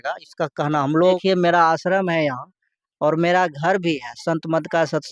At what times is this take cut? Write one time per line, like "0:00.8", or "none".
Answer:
0:01.2